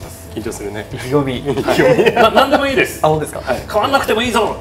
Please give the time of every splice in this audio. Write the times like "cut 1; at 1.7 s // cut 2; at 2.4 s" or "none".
none